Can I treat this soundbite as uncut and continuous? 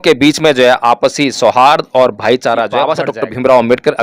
no; 1 cut; at 2.9 s

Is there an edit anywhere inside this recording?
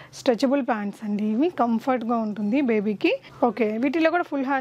yes; 1 cut; at 3.3 s

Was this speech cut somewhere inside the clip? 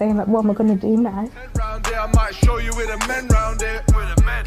yes; 1 cut; at 1.6 s

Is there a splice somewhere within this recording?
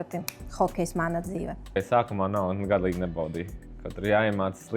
yes; 1 cut; at 1.7 s

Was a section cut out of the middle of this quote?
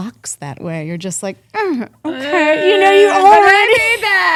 no; 0 cuts

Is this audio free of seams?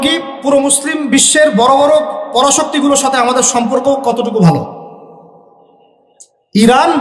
yes; 0 cuts

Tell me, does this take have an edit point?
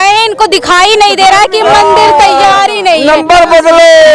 no; 0 cuts

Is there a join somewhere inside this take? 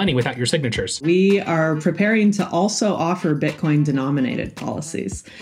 yes; 1 cut; at 1.0 s

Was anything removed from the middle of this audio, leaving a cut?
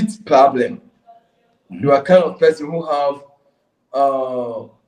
no; 0 cuts

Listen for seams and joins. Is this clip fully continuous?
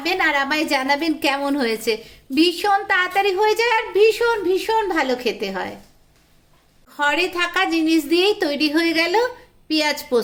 yes; 0 cuts

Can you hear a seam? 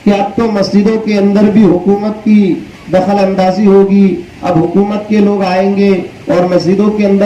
no; 0 cuts

